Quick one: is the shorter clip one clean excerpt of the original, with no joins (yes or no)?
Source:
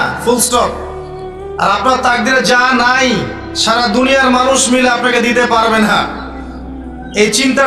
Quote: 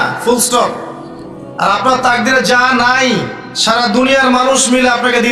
yes